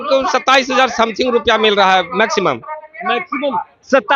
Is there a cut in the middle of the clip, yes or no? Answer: no